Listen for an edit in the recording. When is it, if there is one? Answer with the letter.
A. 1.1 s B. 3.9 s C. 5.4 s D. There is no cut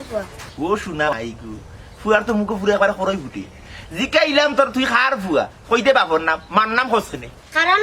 A